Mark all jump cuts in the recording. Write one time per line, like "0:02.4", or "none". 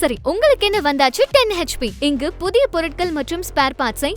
none